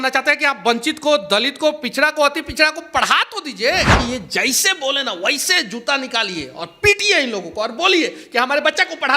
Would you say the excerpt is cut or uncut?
cut